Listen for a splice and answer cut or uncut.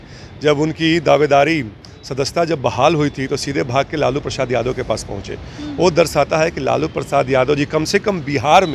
uncut